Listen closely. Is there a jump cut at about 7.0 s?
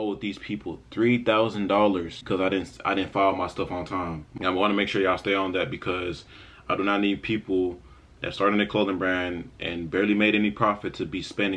no; 2 cuts; at 2.1 s, 4.2 s

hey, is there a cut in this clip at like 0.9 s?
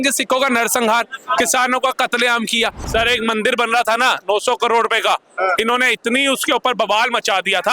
no; 1 cut; at 2.9 s

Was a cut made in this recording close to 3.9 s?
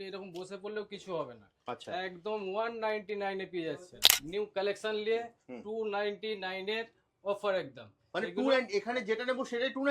yes; 1 cut; at 3.9 s

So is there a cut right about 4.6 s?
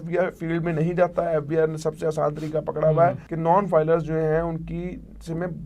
no; 1 cut; at 3.3 s

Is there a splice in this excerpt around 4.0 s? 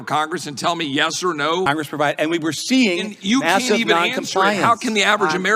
no; 1 cut; at 1.7 s

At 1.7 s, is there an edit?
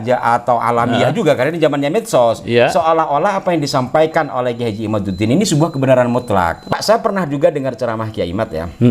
no; 1 cut; at 6.7 s

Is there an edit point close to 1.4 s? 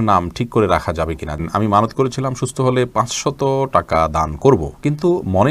yes; 1 cut; at 1.4 s

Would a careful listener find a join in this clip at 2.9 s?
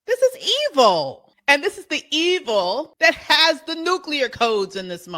yes; 2 cuts; at 1.3 s, 2.9 s

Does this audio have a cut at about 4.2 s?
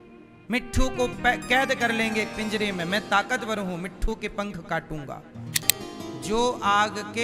no; 1 cut; at 5.6 s

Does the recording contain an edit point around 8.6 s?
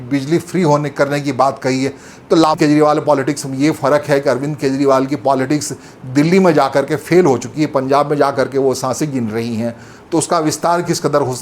no; 1 cut; at 2.6 s

